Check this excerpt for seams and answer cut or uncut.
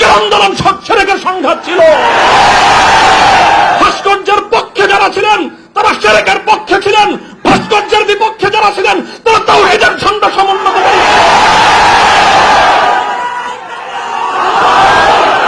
uncut